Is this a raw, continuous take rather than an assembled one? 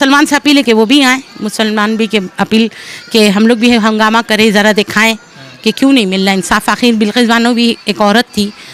yes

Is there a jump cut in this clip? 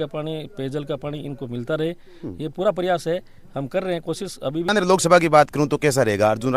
yes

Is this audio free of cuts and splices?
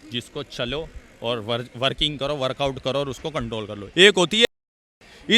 no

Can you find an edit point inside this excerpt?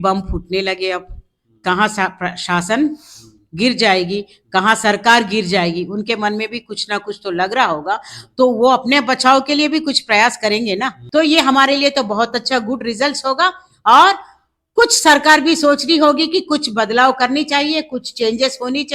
yes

